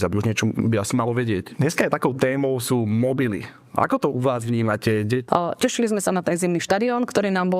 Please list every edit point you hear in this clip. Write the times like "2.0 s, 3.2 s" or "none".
1.5 s, 5.2 s